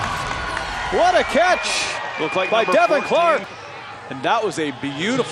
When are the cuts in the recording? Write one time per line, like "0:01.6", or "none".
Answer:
0:03.5